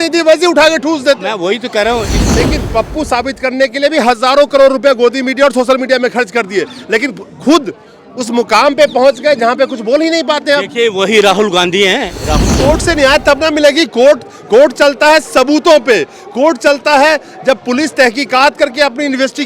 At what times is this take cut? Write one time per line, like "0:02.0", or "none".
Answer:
0:02.2
0:12.4